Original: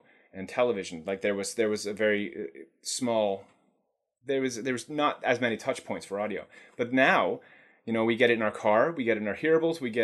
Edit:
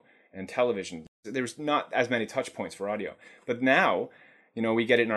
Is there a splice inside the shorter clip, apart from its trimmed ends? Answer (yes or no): yes